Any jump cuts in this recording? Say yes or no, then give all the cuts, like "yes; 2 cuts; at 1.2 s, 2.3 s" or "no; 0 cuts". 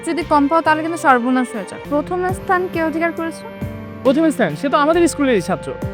yes; 1 cut; at 1.8 s